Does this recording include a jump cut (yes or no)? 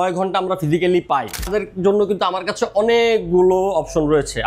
yes